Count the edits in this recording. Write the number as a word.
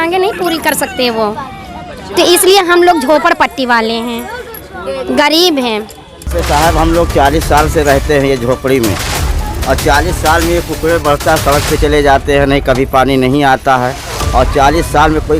one